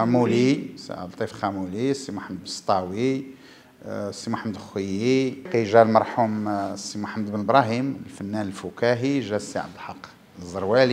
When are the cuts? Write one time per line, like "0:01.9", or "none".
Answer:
0:05.5